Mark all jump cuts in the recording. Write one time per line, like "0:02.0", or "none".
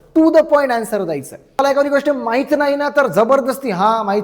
0:01.4